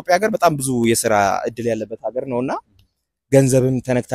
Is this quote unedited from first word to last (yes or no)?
yes